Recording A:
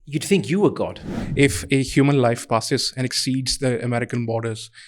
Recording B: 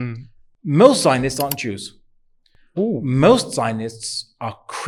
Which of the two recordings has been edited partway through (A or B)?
A